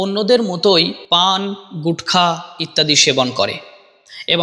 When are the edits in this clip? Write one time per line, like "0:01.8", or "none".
0:01.0

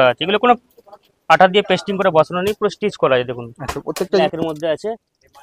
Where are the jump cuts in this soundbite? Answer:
0:04.1

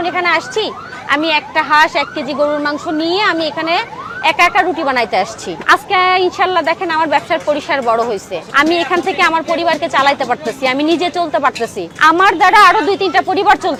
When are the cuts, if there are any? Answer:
none

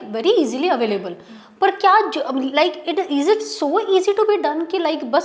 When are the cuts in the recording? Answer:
none

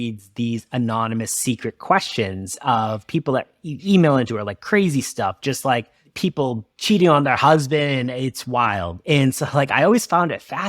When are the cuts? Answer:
0:06.4

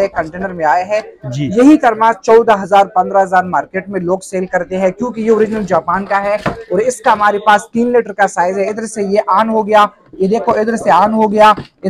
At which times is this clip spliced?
none

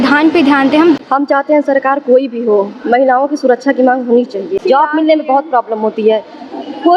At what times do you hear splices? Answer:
0:01.0
0:04.6

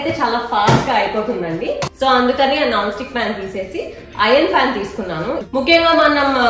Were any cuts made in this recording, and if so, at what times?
0:01.9
0:05.4

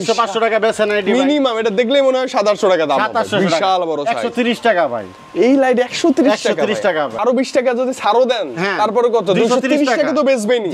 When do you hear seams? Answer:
0:07.1

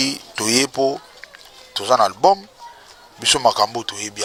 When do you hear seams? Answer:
none

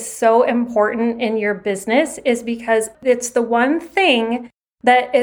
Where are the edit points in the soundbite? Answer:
0:02.9

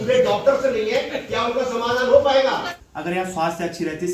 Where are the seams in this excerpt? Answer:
0:02.8

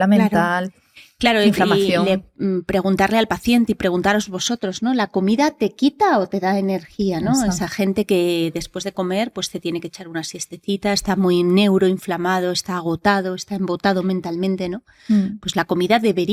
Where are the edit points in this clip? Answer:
none

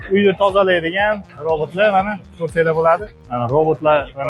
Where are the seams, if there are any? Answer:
0:03.1

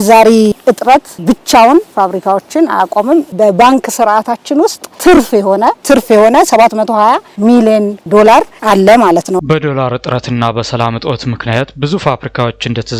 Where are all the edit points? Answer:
none

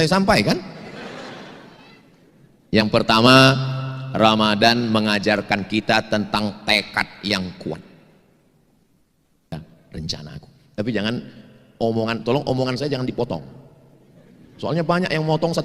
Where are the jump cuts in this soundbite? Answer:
0:09.5

